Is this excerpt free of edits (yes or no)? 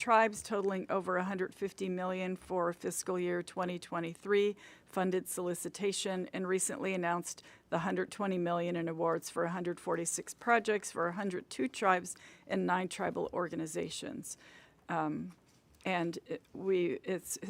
yes